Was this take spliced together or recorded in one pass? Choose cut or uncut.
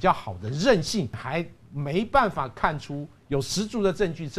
cut